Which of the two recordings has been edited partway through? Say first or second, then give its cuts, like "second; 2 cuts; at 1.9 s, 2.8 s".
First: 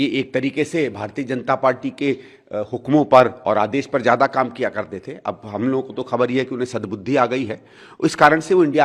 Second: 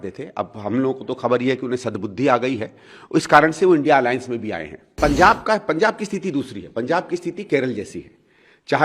second; 1 cut; at 5.0 s